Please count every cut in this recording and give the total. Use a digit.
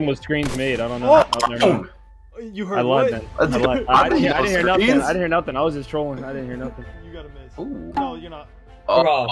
1